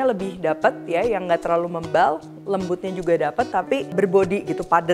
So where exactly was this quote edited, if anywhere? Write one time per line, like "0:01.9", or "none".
0:03.9

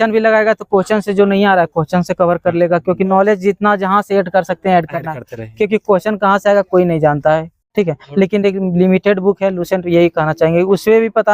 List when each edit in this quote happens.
none

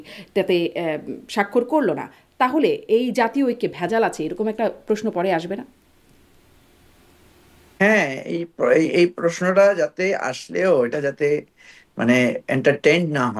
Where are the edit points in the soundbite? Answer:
none

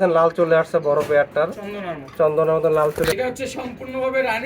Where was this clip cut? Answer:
0:03.1

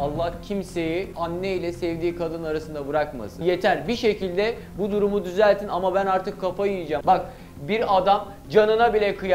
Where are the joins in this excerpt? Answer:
0:01.1
0:03.4
0:07.0

